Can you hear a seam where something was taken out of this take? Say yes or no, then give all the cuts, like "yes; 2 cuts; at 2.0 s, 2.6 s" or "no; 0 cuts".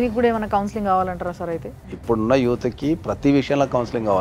no; 0 cuts